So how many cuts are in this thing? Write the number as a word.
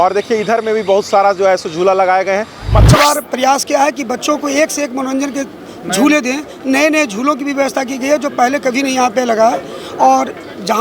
one